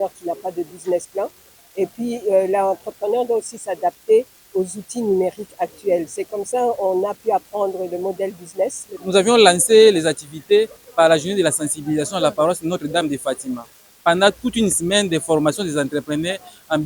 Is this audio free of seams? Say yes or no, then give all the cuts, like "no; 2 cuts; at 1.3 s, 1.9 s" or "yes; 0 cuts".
no; 1 cut; at 9.0 s